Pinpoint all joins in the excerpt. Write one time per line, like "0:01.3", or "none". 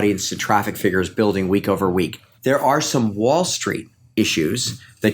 0:02.2